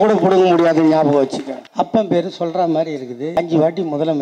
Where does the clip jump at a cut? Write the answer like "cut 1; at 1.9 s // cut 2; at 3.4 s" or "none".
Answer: cut 1; at 1.6 s // cut 2; at 3.3 s